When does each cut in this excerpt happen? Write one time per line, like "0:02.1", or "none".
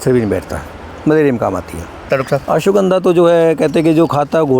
0:02.1